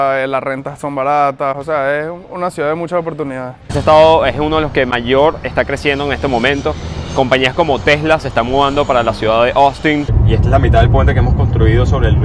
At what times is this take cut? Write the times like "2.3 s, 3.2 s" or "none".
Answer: 3.6 s, 10.2 s